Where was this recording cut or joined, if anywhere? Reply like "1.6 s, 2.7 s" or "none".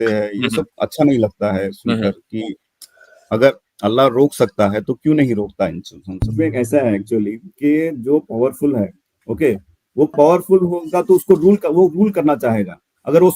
6.3 s